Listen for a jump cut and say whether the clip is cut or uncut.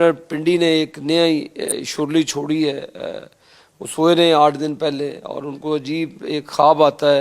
cut